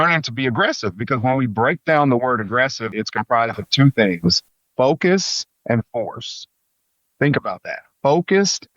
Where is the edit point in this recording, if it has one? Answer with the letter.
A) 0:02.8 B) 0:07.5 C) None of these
A